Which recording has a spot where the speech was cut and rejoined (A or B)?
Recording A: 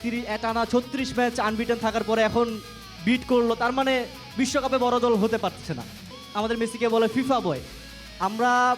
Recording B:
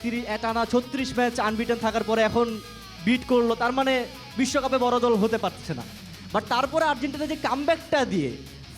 A